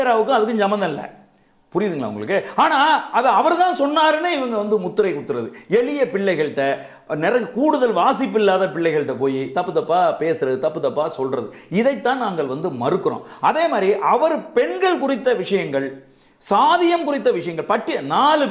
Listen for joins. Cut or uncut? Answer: uncut